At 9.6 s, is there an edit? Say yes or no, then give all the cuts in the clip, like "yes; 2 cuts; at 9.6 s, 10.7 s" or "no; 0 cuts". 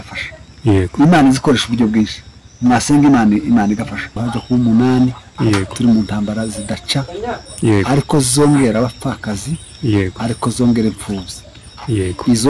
no; 1 cut; at 4.3 s